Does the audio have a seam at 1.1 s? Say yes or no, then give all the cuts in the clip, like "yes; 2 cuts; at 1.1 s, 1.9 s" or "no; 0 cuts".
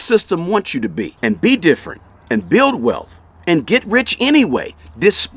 yes; 1 cut; at 1.1 s